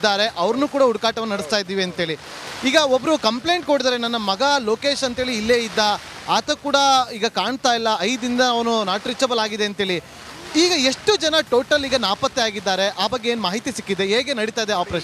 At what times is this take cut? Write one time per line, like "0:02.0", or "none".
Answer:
none